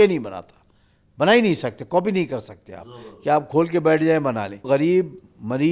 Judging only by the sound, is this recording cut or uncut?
cut